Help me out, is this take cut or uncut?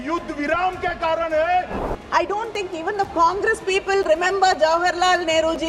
cut